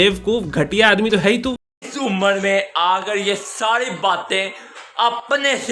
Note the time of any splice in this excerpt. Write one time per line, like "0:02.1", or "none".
0:01.4